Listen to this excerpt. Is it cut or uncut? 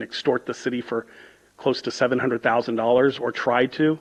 uncut